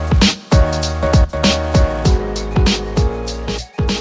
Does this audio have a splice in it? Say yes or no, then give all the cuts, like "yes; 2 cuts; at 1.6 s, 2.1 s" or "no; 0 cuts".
no; 0 cuts